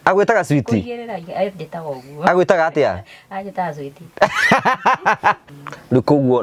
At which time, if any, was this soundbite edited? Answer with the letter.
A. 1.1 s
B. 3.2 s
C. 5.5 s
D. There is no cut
C